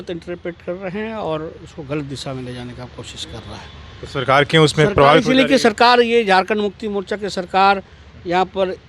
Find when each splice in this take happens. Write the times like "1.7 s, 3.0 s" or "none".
none